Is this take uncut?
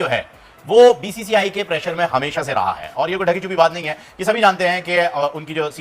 yes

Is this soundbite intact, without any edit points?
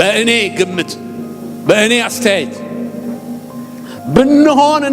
yes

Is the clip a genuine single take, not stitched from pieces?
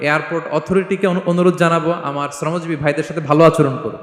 yes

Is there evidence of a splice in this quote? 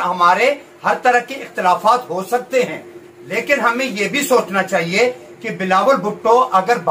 no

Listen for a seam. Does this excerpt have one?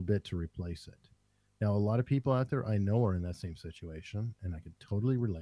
no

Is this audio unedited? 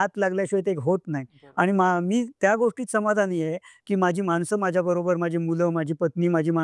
yes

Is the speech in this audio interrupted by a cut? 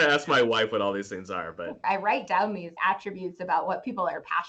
yes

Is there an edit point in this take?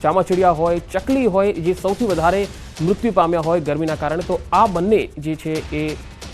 yes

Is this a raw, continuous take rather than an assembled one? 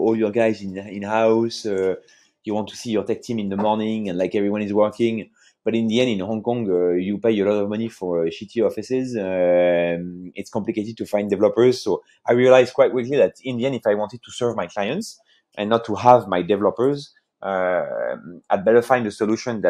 yes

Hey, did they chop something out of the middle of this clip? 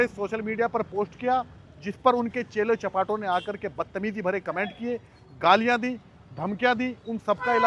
no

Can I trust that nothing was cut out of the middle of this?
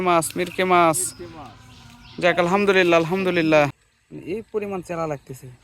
no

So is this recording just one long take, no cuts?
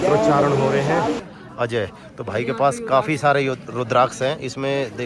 no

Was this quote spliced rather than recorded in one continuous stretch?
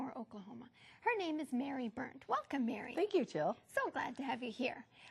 yes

